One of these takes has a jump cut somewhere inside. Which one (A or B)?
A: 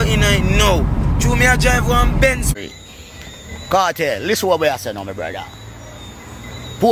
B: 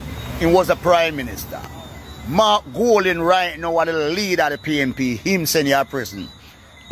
A